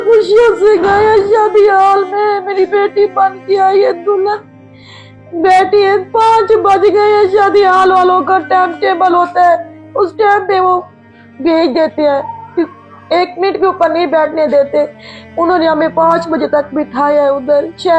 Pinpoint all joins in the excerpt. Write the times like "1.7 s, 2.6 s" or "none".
none